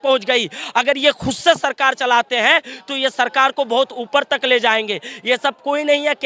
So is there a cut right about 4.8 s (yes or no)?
no